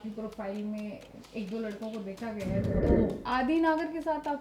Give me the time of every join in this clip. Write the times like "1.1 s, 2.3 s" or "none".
2.8 s